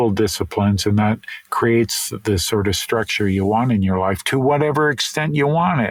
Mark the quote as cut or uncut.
uncut